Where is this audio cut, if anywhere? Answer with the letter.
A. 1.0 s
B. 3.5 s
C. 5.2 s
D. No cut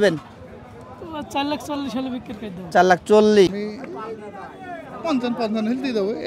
B